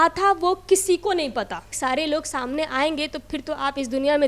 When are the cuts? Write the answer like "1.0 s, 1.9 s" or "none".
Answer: 1.7 s

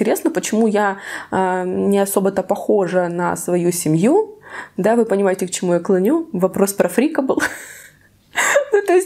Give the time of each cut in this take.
none

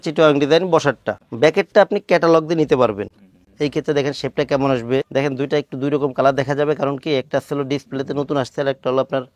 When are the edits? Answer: none

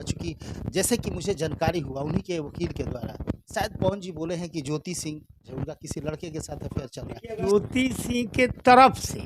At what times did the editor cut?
3.4 s, 5.5 s, 7.5 s

